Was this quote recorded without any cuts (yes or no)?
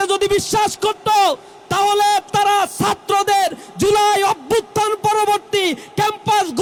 yes